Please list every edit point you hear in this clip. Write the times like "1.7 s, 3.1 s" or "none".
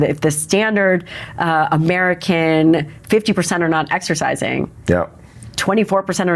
none